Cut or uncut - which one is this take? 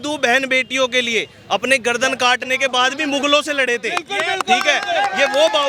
uncut